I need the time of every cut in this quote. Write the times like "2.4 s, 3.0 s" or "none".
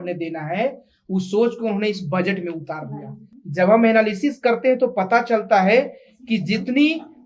none